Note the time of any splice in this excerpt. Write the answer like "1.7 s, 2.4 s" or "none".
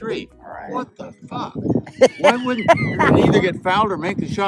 3.1 s